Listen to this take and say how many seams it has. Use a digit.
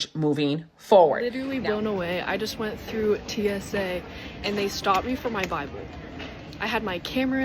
1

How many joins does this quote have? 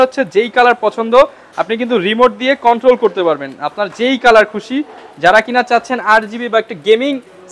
0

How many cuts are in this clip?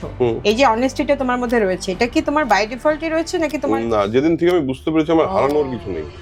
0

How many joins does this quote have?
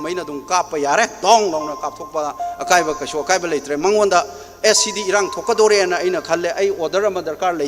0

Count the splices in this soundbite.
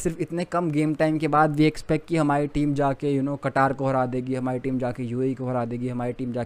0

